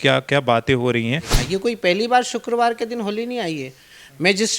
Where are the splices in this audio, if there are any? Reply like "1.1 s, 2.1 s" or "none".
1.3 s